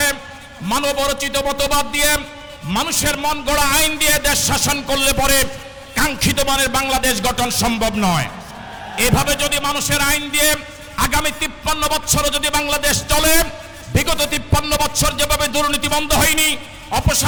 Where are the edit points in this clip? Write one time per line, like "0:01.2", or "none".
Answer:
none